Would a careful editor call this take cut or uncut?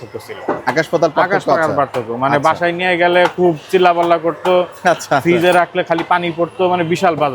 uncut